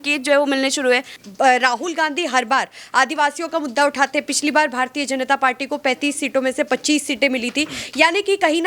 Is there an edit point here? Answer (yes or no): yes